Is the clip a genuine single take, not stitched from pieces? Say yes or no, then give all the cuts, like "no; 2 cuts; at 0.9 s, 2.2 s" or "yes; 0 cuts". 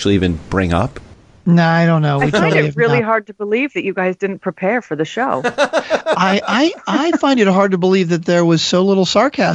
yes; 0 cuts